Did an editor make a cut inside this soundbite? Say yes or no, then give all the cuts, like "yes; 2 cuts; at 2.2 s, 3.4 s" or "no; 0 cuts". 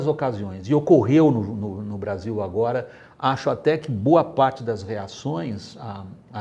no; 0 cuts